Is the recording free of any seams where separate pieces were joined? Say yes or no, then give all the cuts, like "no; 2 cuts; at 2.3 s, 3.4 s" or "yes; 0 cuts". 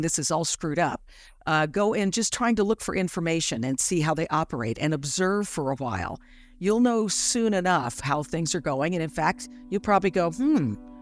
yes; 0 cuts